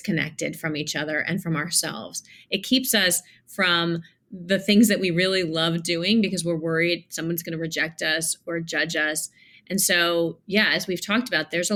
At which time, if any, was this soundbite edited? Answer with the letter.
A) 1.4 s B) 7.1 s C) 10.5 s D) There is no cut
D